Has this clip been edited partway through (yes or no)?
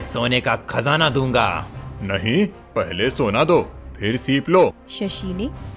yes